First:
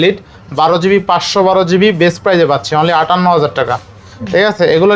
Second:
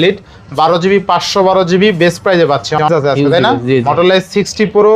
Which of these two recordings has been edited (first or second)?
second